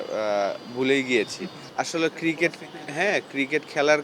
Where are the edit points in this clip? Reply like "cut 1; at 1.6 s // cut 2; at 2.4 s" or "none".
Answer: cut 1; at 1.6 s